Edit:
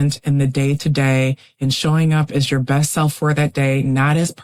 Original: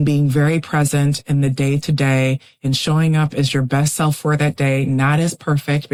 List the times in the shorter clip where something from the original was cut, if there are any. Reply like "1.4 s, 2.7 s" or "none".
none